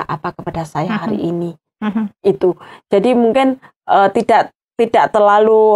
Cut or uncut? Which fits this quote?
uncut